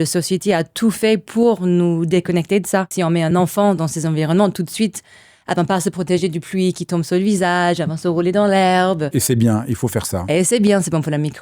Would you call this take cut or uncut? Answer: cut